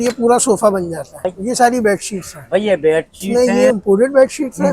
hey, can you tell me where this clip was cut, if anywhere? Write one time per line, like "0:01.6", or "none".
0:01.3
0:03.2